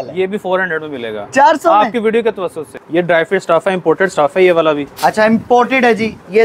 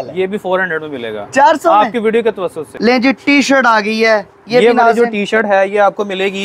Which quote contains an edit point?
second; 1 cut; at 2.7 s

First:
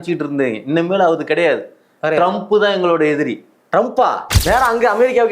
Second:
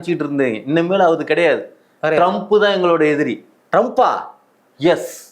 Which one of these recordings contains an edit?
first; 1 cut; at 4.3 s

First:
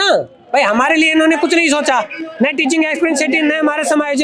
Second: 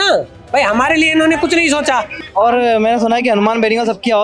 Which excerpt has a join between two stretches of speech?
second; 1 cut; at 2.2 s

